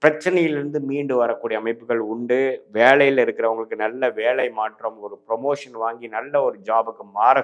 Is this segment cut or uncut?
uncut